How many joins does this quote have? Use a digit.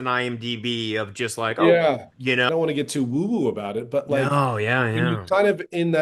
1